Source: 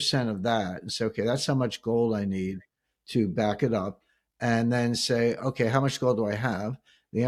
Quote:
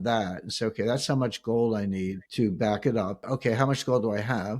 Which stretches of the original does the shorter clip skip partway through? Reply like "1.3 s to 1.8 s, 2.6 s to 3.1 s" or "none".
2.6 s to 3.0 s, 4.1 s to 5.4 s